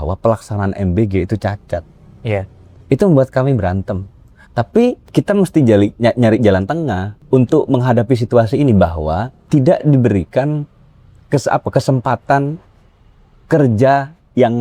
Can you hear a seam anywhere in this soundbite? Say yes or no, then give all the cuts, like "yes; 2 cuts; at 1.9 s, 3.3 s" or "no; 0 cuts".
no; 0 cuts